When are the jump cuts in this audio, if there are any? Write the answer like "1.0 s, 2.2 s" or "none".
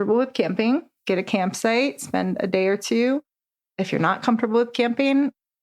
0.9 s